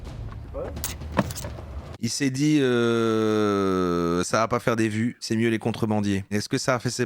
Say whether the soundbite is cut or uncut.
uncut